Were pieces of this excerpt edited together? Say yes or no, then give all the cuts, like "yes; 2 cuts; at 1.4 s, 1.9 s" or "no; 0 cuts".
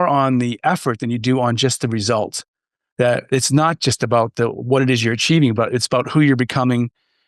no; 0 cuts